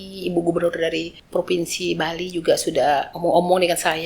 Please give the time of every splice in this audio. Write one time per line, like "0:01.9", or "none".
0:01.2
0:03.1